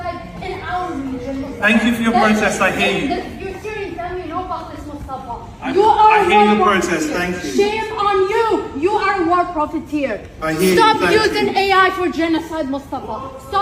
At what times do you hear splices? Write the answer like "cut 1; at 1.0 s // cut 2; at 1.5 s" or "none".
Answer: none